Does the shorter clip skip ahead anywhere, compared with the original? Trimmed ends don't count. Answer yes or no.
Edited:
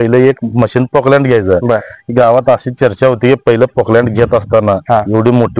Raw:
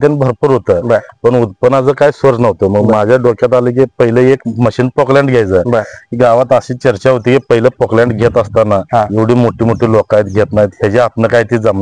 no